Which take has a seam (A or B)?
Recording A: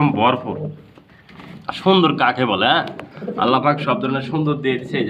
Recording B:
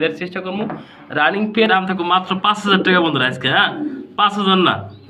B